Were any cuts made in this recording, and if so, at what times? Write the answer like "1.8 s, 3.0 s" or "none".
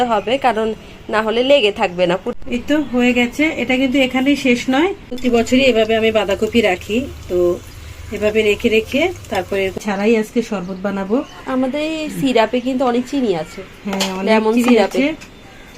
2.3 s, 5.1 s, 9.8 s